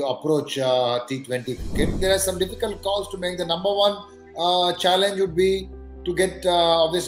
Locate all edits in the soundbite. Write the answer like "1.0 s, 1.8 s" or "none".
2.0 s